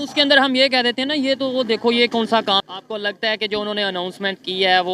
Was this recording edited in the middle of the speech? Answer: yes; 1 cut; at 2.6 s

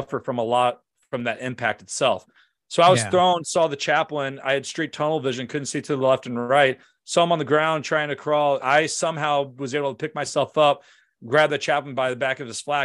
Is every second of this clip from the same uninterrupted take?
no; 1 cut; at 8.6 s

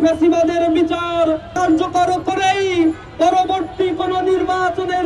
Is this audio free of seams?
no; 1 cut; at 1.5 s

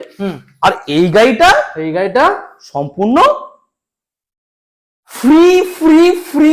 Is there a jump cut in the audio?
no; 0 cuts

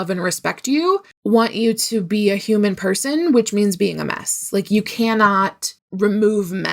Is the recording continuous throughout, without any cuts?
yes; 0 cuts

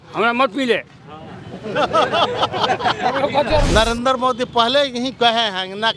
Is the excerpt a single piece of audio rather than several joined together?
no; 1 cut; at 3.7 s

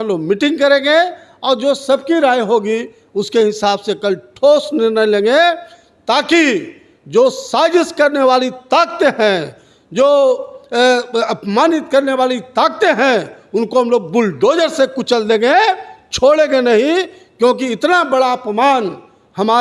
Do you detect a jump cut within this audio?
no; 0 cuts

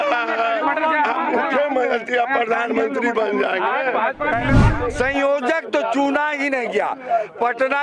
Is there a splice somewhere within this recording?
yes; 1 cut; at 4.6 s

